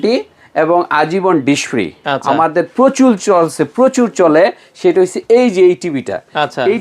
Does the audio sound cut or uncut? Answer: cut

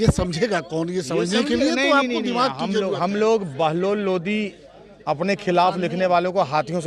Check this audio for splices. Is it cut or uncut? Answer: uncut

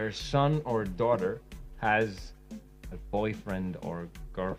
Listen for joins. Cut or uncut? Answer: uncut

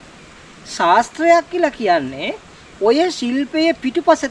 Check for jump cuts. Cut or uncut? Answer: uncut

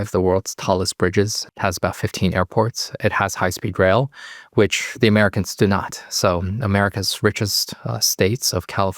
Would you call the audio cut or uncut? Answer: cut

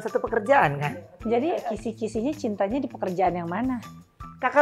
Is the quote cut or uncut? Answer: cut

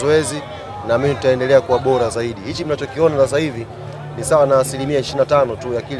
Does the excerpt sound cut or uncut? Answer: uncut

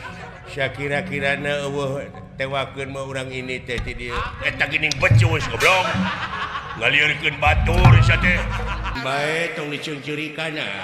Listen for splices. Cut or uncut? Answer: cut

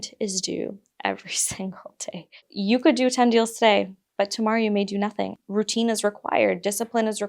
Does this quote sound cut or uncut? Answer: cut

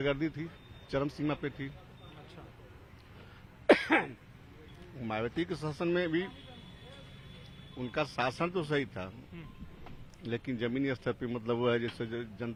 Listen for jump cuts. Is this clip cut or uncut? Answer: uncut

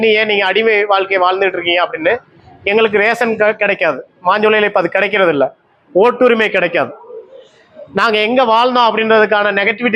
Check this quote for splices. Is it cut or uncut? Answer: uncut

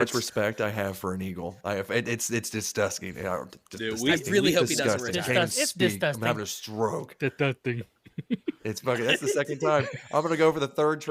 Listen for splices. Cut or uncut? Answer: uncut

